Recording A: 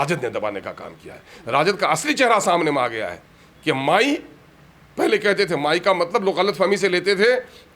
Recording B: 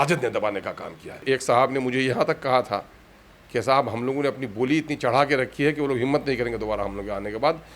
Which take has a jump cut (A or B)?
B